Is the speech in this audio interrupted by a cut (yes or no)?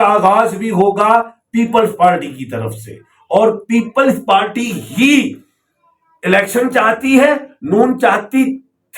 no